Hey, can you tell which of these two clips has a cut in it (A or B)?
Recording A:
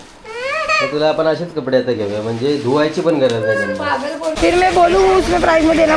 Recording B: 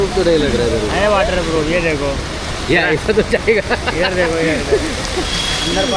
A